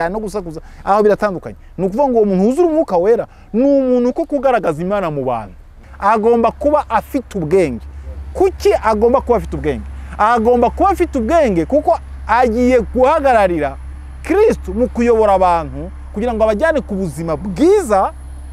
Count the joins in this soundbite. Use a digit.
1